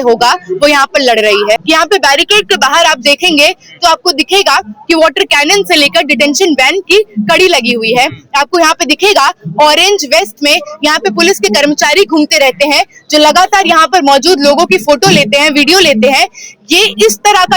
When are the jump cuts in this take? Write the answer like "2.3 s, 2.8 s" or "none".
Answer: 1.6 s